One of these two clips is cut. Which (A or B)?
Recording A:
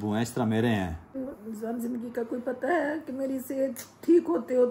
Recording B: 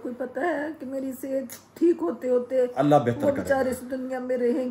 A